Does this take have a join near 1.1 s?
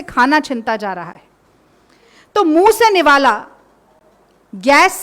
no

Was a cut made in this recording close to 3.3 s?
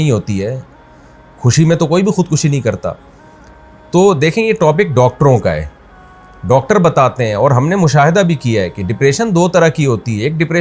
no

